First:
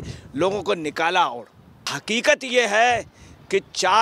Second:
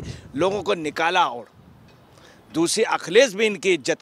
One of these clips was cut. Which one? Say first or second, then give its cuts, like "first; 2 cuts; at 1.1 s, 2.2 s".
first; 1 cut; at 2.0 s